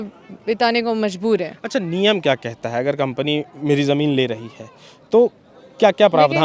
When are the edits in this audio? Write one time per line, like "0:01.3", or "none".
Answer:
none